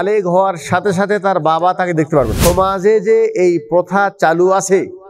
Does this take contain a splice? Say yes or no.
yes